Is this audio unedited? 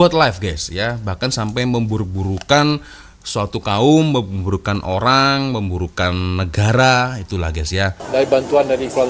no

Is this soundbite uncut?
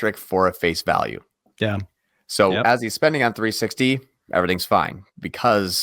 yes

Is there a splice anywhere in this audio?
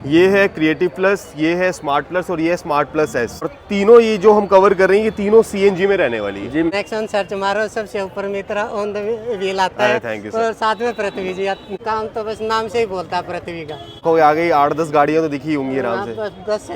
yes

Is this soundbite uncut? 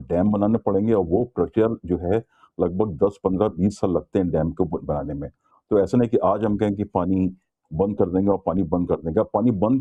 yes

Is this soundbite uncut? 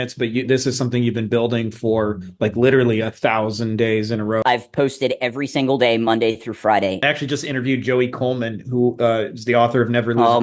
no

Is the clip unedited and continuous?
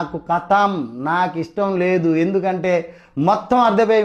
yes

